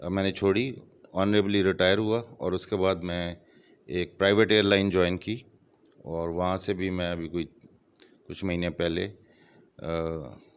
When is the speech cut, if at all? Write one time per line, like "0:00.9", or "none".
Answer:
none